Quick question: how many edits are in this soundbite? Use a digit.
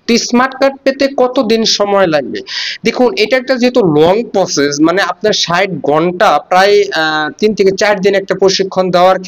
0